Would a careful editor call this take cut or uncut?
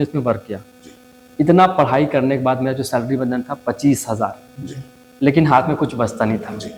uncut